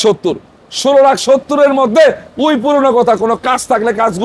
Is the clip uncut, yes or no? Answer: yes